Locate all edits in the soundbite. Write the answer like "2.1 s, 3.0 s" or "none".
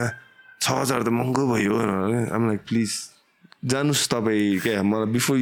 none